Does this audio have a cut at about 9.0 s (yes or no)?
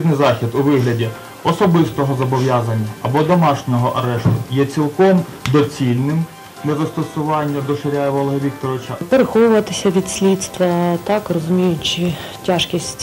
yes